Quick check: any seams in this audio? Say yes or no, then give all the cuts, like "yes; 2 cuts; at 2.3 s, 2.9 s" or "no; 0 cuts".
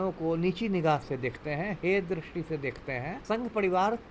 yes; 1 cut; at 3.1 s